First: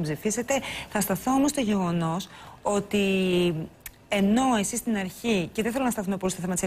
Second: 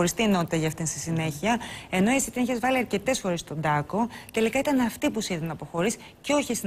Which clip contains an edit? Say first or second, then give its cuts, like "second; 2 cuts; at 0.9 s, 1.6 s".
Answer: first; 1 cut; at 1.0 s